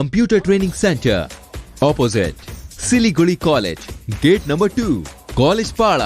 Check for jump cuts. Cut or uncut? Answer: uncut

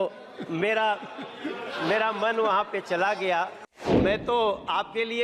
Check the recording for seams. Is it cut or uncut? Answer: cut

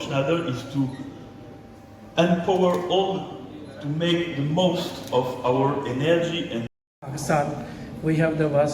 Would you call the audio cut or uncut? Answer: cut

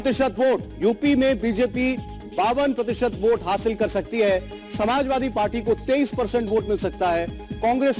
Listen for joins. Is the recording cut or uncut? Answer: cut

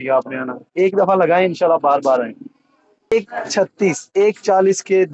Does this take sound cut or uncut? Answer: cut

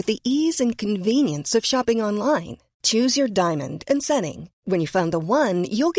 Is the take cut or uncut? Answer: uncut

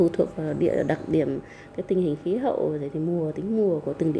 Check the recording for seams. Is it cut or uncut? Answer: uncut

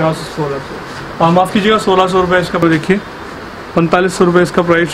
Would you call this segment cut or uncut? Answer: cut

